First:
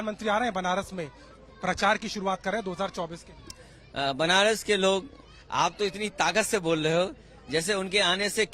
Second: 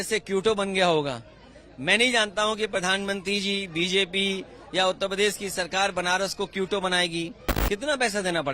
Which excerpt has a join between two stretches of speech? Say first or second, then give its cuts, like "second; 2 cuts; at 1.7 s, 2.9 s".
second; 1 cut; at 7.5 s